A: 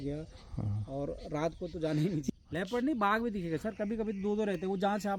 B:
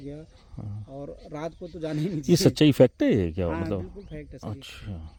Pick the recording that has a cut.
A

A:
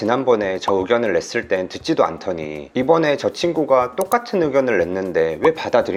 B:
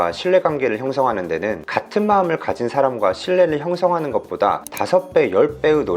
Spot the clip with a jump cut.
B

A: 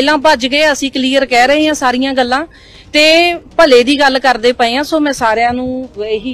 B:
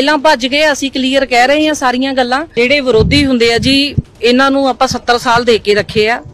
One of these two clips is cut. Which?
B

